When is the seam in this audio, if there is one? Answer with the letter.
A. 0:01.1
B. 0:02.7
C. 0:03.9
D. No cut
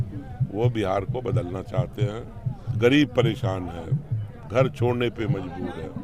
B